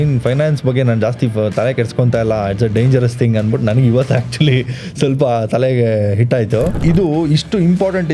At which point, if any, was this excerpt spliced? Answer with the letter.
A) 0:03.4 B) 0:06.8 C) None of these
B